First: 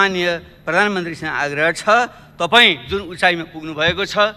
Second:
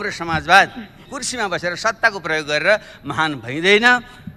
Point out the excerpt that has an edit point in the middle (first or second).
second